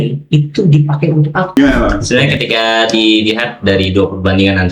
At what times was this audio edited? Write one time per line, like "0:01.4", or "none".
0:01.6